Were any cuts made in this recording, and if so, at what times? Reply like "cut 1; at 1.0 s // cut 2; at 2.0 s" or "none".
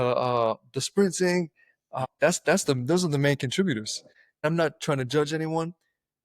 cut 1; at 4.4 s